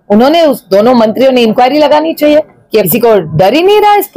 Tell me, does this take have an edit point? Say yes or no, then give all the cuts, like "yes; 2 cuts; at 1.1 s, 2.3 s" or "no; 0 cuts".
yes; 1 cut; at 2.9 s